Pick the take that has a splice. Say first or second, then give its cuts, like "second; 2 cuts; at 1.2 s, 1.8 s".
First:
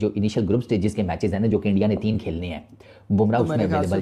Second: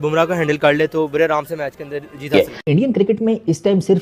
second; 1 cut; at 2.3 s